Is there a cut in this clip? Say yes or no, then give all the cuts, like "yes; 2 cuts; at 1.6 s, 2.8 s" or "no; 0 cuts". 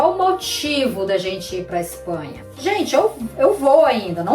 yes; 1 cut; at 2.4 s